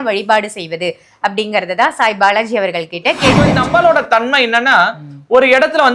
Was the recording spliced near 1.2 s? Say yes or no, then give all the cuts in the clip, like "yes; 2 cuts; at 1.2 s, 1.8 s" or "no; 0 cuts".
no; 1 cut; at 3.6 s